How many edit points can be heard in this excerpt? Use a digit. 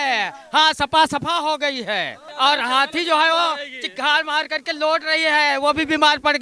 1